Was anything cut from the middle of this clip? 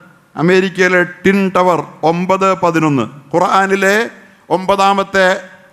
no; 0 cuts

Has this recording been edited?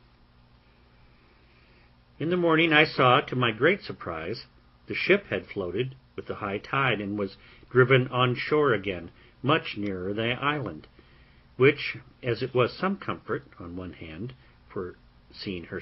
no; 0 cuts

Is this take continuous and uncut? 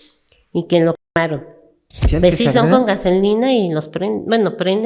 no; 1 cut; at 2.0 s

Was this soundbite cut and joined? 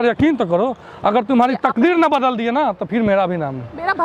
no; 0 cuts

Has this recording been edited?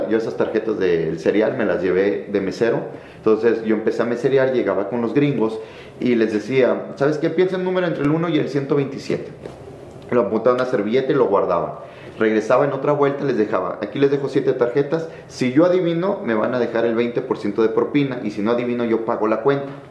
no; 0 cuts

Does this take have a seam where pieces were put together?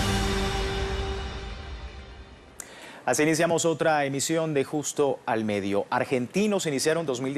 yes; 1 cut; at 2.7 s

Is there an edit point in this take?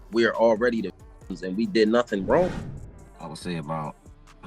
yes; 1 cut; at 2.6 s

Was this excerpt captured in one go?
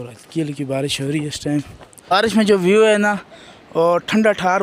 no; 1 cut; at 2.1 s

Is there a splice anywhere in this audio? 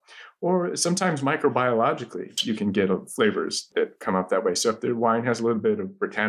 no; 0 cuts

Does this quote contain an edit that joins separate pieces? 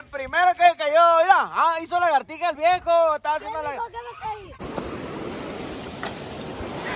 yes; 1 cut; at 4.6 s

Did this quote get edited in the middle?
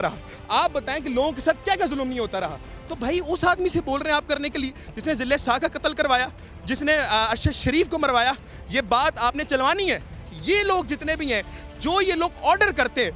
no; 0 cuts

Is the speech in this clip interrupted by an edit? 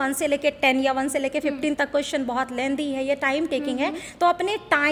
no; 0 cuts

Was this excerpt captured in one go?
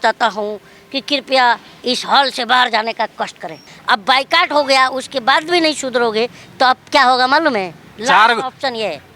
no; 2 cuts; at 3.7 s, 7.8 s

